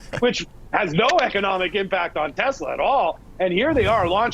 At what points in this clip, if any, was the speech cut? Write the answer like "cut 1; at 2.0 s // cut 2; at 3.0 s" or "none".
cut 1; at 3.2 s

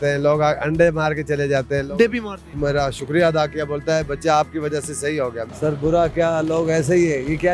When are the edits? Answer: cut 1; at 2.6 s // cut 2; at 5.5 s

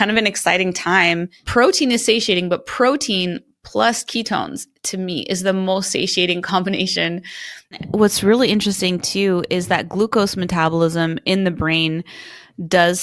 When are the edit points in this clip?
cut 1; at 1.4 s // cut 2; at 7.8 s

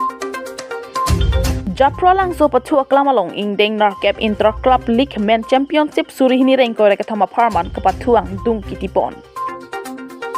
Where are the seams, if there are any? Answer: cut 1; at 1.6 s // cut 2; at 9.3 s

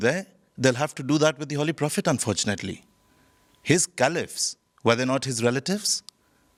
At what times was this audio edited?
none

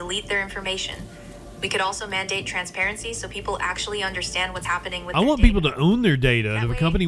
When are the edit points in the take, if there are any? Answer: none

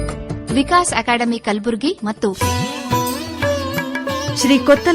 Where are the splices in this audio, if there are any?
cut 1; at 2.2 s

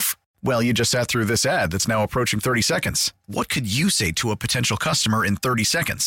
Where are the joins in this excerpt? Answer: none

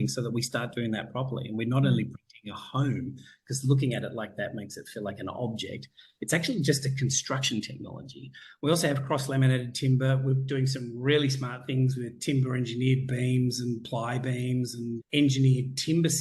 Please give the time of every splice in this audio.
cut 1; at 15.0 s

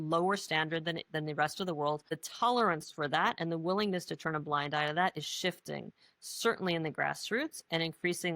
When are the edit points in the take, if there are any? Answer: cut 1; at 2.2 s

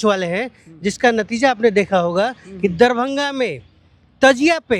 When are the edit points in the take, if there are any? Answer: none

